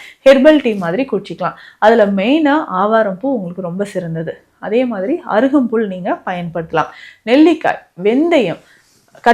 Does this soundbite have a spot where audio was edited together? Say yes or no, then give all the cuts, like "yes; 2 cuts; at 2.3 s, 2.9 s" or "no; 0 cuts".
no; 0 cuts